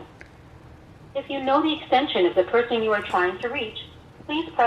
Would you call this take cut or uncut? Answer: uncut